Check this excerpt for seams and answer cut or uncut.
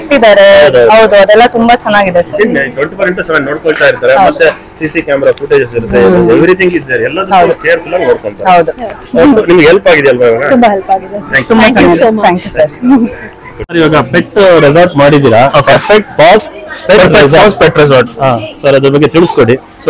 uncut